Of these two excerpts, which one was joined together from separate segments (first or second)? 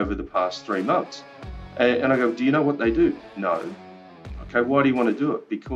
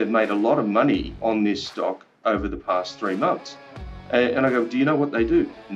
second